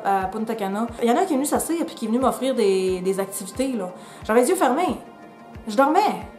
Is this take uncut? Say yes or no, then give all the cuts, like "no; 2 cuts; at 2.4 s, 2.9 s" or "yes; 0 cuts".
no; 1 cut; at 0.9 s